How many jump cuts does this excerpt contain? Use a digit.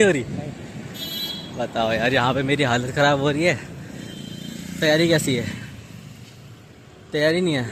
0